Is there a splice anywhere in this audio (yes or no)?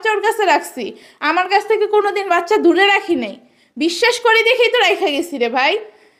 no